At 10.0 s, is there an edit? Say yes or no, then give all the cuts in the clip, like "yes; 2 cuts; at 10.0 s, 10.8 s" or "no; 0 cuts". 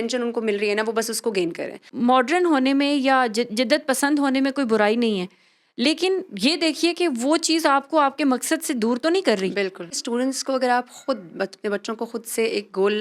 yes; 2 cuts; at 1.9 s, 10.0 s